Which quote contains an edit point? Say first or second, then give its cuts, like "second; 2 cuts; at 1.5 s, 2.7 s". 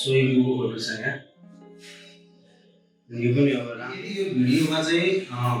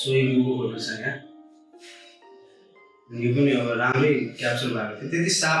first; 1 cut; at 3.9 s